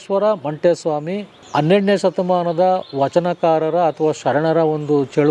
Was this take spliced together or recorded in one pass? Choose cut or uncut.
uncut